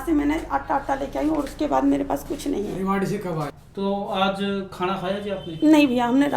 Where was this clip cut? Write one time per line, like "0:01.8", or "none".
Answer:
0:03.6